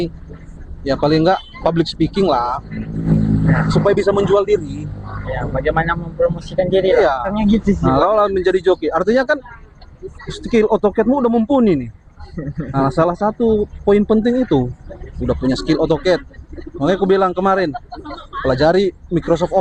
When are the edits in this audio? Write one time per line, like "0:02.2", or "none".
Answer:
0:01.5
0:03.1
0:07.3